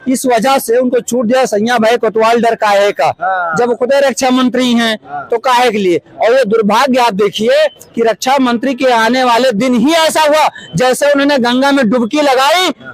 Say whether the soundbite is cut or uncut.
uncut